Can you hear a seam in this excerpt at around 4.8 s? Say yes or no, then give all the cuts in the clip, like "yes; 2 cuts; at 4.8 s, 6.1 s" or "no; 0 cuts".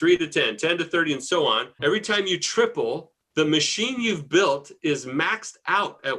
no; 1 cut; at 1.8 s